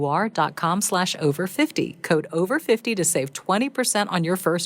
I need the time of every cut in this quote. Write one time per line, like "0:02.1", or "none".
none